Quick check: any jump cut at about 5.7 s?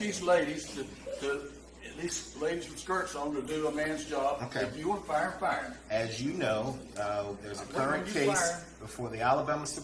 no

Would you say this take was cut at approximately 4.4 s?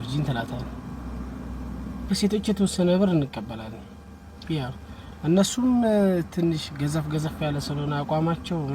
no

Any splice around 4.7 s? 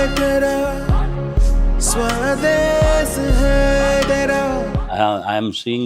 yes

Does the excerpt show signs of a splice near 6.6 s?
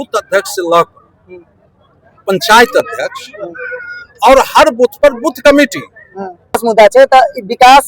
yes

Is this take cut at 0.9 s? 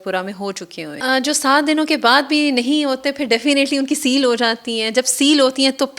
yes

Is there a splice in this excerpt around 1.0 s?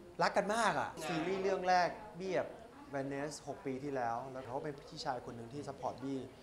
yes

